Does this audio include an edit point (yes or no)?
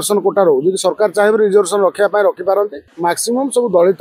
yes